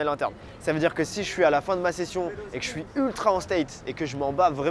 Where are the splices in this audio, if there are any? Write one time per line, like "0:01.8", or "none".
none